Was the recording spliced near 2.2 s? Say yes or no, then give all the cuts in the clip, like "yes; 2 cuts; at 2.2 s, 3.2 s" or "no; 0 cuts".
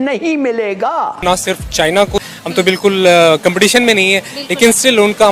yes; 2 cuts; at 1.2 s, 2.2 s